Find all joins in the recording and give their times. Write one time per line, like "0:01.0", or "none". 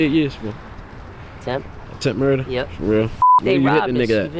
0:03.4